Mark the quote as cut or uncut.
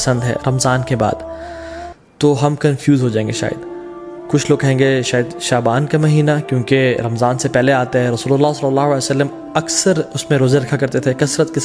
uncut